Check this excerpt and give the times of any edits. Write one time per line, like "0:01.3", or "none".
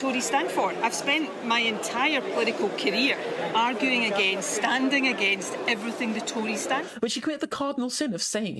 0:06.9